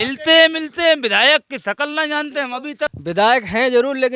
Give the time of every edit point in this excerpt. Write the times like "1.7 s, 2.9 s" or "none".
3.0 s